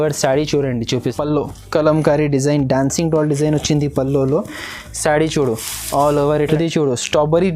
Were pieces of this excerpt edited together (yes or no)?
yes